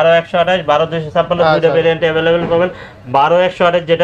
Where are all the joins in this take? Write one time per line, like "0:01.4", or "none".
none